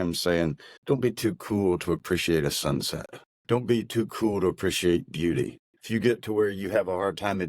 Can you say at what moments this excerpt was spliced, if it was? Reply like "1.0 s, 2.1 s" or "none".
3.3 s